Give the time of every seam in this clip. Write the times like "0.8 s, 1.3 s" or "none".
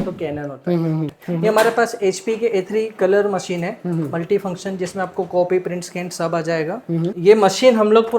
1.1 s, 7.1 s